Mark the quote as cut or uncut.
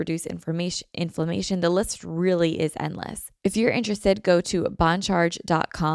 cut